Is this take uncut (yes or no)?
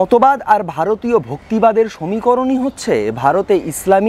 yes